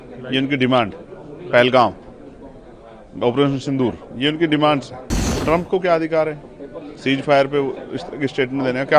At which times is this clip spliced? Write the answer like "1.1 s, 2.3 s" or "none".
5.3 s

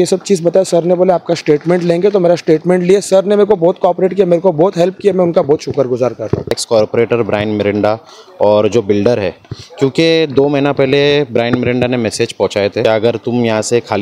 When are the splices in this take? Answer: 6.6 s, 12.8 s

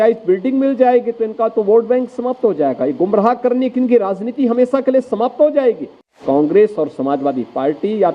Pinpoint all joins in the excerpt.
6.2 s

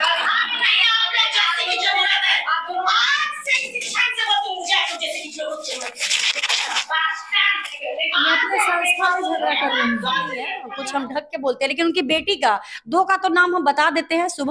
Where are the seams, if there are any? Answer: 10.7 s

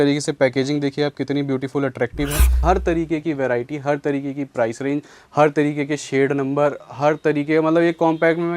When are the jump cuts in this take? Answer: 2.5 s

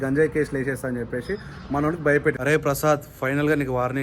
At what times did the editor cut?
2.4 s

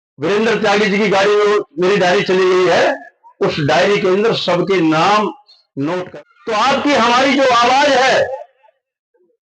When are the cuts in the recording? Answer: 6.1 s

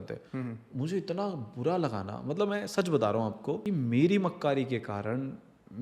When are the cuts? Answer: 3.6 s

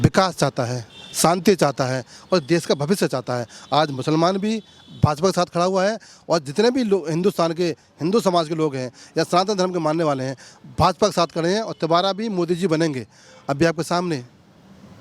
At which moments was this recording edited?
none

